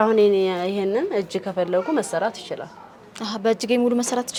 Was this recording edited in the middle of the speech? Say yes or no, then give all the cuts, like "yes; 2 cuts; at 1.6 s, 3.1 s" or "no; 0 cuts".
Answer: no; 0 cuts